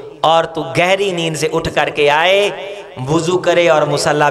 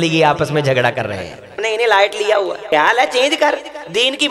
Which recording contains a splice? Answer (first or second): second